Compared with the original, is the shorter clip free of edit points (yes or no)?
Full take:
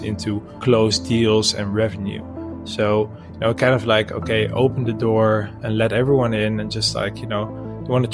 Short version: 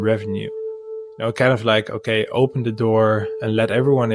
no